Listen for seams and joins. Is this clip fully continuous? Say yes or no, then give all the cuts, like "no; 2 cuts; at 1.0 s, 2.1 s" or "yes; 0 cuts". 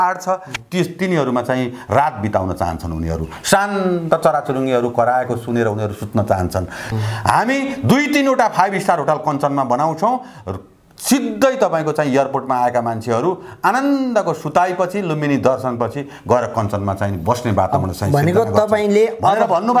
yes; 0 cuts